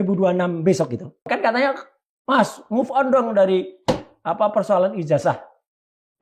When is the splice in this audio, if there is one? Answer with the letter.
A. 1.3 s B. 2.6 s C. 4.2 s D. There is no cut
A